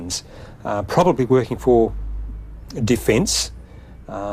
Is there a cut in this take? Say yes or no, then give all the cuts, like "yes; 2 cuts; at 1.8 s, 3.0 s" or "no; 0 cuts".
no; 0 cuts